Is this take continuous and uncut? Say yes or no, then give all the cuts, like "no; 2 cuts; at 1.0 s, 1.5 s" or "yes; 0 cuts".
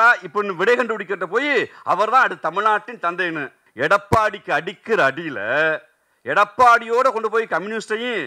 no; 1 cut; at 3.6 s